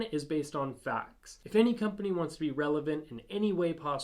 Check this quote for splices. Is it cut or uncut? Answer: cut